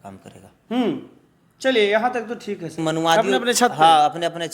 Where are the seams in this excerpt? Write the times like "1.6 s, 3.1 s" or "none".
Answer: 2.8 s